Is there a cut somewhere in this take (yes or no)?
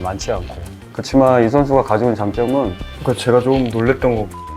yes